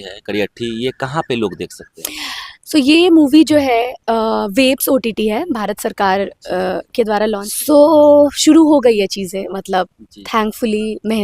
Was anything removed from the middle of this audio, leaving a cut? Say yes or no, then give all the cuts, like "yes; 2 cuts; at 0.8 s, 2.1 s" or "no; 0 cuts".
yes; 1 cut; at 7.5 s